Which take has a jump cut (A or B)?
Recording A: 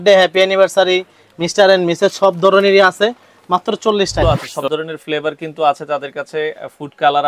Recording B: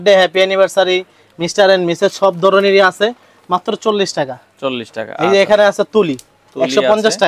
A